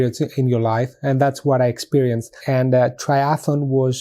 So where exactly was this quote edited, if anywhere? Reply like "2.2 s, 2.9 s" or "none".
2.3 s

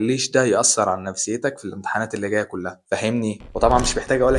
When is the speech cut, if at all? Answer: 3.5 s

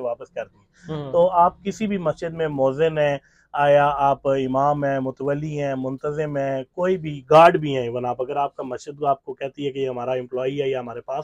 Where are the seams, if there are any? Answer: none

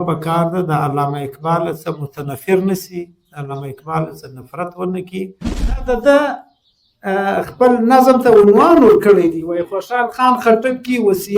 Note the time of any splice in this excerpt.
5.8 s

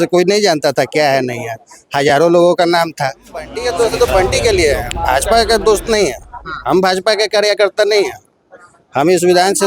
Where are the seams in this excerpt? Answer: 3.6 s

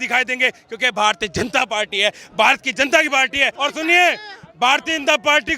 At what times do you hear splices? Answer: 3.5 s

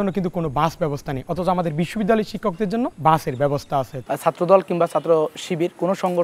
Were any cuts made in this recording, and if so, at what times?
2.9 s, 3.9 s

